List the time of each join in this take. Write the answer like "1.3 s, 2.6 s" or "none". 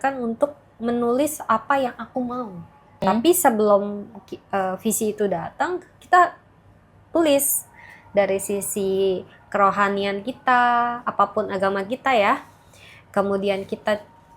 3.0 s